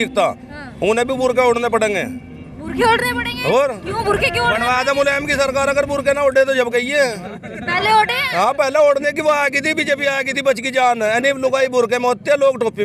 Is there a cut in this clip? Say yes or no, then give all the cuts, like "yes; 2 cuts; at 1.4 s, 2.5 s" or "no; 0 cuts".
no; 0 cuts